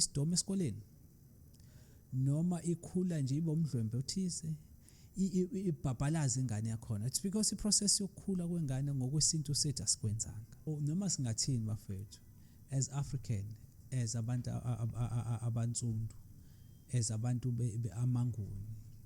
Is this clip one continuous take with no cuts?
no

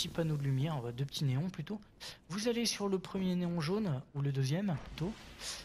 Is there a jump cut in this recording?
no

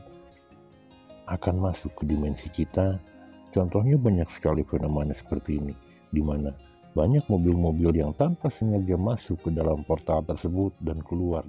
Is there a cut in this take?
no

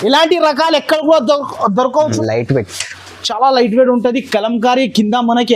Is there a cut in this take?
yes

